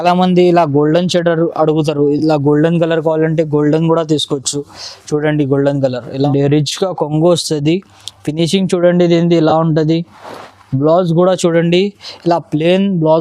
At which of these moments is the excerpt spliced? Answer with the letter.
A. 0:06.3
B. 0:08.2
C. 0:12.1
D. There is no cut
A